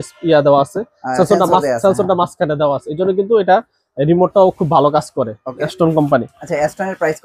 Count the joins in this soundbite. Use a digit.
1